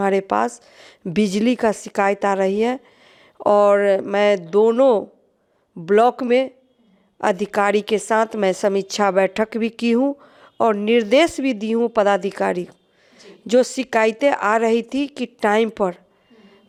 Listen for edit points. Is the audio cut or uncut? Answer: uncut